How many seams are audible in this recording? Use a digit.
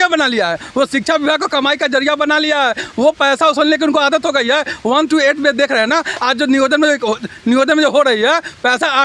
0